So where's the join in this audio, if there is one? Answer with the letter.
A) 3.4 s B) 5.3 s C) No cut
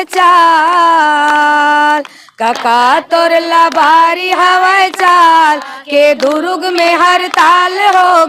C